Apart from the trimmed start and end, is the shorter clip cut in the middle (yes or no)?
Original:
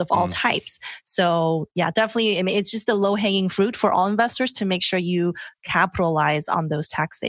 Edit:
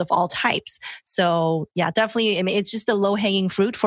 no